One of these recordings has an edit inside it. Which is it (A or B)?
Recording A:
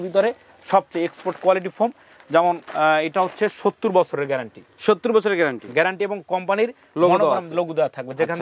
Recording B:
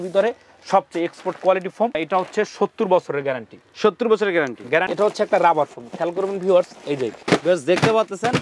B